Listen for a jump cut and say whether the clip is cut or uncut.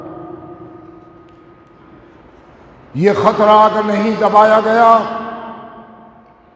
uncut